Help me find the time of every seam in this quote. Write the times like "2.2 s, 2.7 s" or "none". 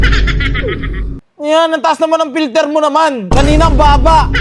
1.2 s